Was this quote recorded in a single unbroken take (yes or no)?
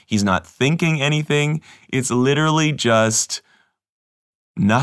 yes